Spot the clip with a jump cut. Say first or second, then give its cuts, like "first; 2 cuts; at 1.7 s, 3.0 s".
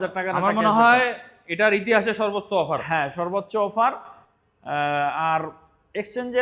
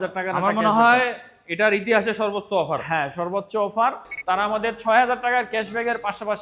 second; 1 cut; at 4.1 s